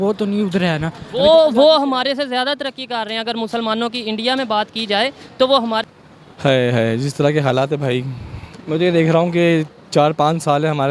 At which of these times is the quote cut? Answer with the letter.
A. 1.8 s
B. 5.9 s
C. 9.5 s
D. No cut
B